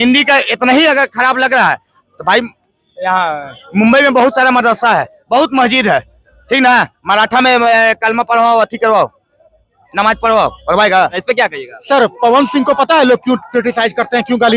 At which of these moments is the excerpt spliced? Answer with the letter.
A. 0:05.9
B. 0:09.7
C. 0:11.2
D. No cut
C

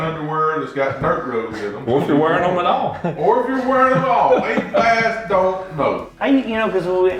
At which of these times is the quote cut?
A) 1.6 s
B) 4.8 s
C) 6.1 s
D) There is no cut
C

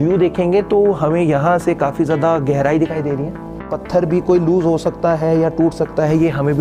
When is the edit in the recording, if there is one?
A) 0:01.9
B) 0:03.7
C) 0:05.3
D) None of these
B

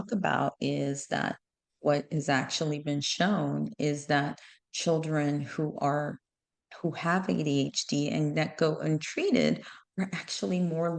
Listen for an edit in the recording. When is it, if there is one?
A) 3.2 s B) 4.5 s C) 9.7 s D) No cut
D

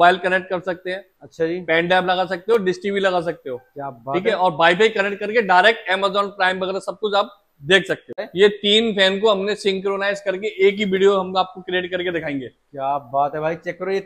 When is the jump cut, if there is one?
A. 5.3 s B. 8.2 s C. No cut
B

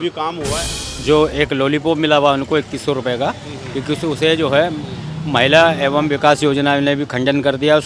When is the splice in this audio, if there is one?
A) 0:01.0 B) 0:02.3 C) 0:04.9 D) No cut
A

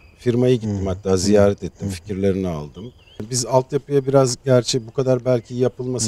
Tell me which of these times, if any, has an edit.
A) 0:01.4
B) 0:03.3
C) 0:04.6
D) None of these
B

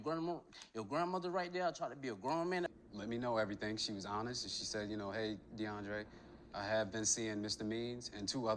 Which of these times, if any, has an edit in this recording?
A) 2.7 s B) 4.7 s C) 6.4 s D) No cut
A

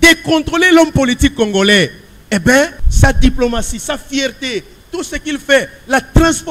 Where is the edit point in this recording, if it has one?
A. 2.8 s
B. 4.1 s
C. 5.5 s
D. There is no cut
A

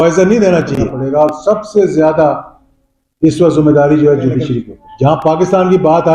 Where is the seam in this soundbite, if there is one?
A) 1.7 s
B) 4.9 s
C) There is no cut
B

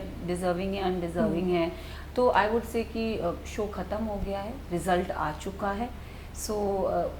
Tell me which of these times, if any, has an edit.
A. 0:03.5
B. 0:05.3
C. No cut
C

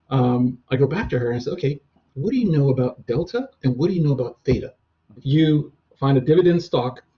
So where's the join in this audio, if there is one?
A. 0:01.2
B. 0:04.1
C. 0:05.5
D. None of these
C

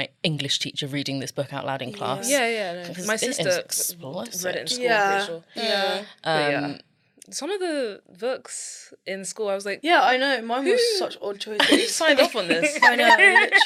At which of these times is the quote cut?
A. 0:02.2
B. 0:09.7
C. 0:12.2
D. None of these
D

